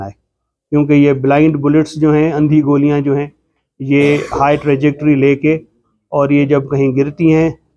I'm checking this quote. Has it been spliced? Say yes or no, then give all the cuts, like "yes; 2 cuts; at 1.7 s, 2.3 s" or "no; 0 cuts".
no; 0 cuts